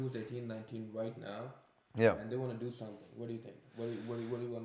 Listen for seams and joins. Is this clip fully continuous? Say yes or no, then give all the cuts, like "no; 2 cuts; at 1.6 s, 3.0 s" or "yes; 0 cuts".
yes; 0 cuts